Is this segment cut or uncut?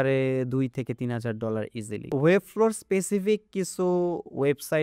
cut